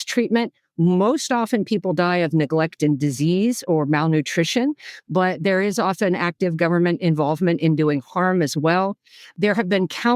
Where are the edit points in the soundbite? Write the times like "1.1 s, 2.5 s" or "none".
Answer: none